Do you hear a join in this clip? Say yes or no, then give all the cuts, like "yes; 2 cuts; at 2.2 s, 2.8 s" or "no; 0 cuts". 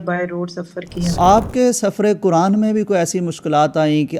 yes; 1 cut; at 1.2 s